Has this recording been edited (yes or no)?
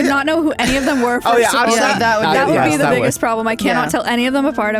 no